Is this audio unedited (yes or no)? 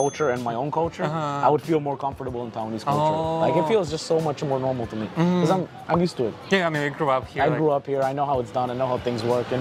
yes